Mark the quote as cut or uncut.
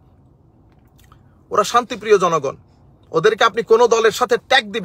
uncut